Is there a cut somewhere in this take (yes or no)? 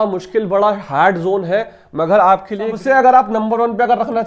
yes